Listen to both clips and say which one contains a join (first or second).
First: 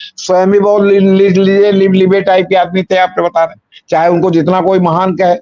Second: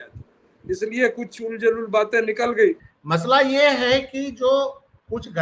second